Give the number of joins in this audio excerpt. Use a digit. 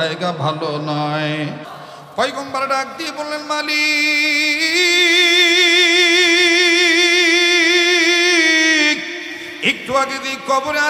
1